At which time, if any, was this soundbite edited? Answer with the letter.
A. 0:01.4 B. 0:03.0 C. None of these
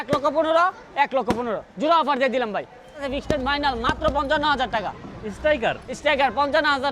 B